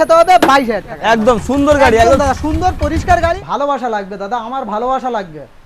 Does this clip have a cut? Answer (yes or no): yes